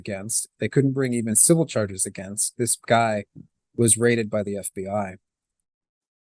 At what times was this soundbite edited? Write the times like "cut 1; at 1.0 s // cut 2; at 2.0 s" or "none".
none